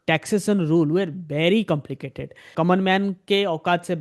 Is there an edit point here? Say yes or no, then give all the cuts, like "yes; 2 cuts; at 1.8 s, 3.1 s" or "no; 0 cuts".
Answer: yes; 1 cut; at 2.5 s